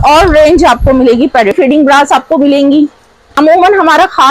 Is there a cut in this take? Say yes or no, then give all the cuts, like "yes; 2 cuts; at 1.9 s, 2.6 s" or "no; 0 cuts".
yes; 2 cuts; at 1.5 s, 3.3 s